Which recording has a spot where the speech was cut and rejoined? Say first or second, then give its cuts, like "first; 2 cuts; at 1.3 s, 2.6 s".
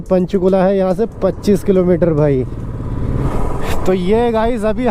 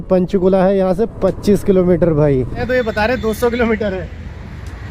second; 1 cut; at 2.6 s